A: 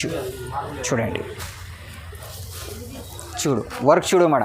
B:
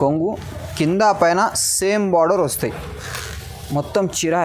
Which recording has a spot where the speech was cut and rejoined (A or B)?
A